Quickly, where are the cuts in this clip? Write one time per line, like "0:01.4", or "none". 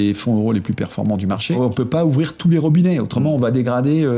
0:01.6